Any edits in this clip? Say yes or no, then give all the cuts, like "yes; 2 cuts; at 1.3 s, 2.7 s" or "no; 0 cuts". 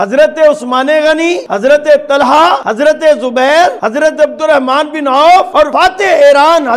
yes; 4 cuts; at 1.5 s, 2.7 s, 3.8 s, 5.7 s